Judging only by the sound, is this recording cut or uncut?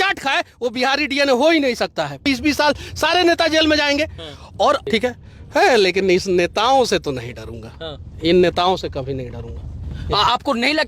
cut